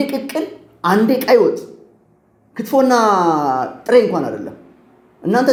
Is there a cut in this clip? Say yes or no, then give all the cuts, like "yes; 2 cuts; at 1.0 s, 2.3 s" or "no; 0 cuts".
no; 0 cuts